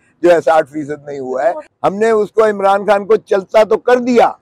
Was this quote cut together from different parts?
yes; 1 cut; at 1.7 s

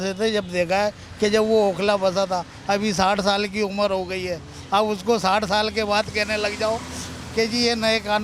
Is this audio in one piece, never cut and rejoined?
yes; 0 cuts

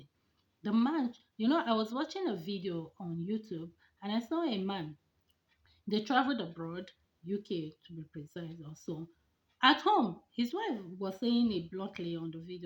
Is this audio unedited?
yes; 0 cuts

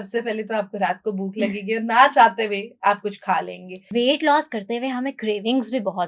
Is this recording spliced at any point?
yes; 1 cut; at 3.9 s

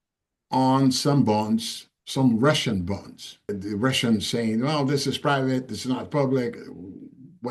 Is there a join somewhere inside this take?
yes; 1 cut; at 3.4 s

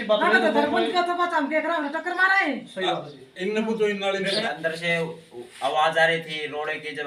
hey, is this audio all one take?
no; 1 cut; at 4.4 s

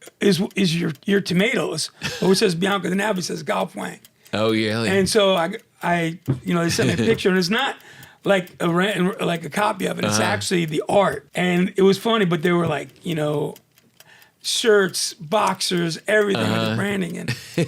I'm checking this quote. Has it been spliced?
yes; 1 cut; at 11.2 s

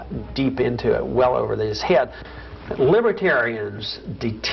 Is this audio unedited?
no; 1 cut; at 2.2 s

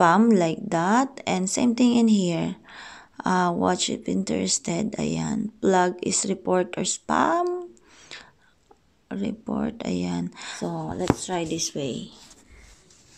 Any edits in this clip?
yes; 1 cut; at 10.4 s

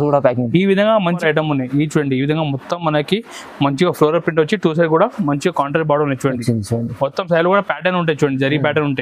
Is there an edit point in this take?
yes; 1 cut; at 1.2 s

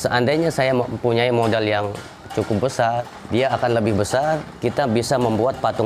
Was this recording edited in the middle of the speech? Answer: yes; 2 cuts; at 3.1 s, 4.5 s

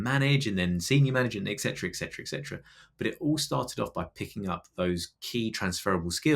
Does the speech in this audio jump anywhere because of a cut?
no; 0 cuts

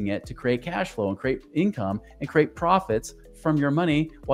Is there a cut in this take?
no; 0 cuts

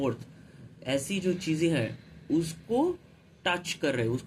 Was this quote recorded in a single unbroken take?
yes; 0 cuts

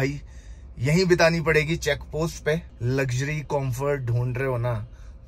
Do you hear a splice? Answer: yes; 1 cut; at 2.7 s

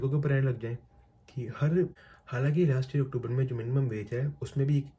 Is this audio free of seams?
no; 1 cut; at 2.0 s

